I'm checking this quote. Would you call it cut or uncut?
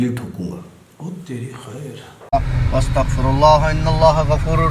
cut